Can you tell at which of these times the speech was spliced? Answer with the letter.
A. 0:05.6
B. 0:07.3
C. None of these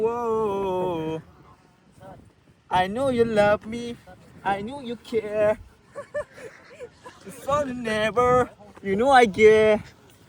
C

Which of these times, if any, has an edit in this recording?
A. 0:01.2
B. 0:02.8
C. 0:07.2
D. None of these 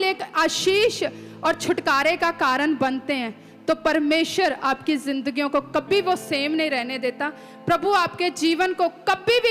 D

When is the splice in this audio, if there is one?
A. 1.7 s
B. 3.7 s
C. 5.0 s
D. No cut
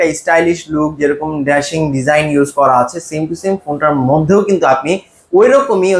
D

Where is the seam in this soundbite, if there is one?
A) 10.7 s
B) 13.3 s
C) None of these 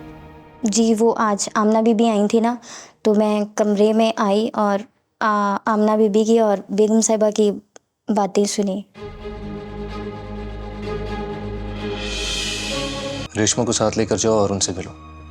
B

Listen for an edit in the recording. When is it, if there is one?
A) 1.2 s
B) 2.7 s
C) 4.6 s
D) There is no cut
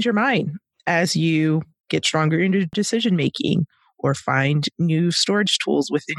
B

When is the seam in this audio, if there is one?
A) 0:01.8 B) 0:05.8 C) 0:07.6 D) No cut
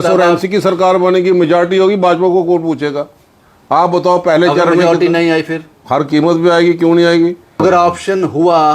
C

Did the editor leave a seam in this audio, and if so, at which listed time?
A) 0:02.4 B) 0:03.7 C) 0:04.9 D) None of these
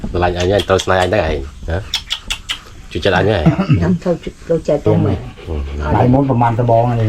C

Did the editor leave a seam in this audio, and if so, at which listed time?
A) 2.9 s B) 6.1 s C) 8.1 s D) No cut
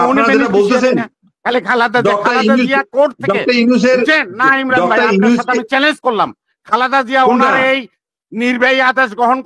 D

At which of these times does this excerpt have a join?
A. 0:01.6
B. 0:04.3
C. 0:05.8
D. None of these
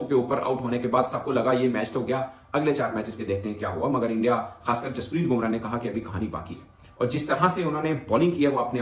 D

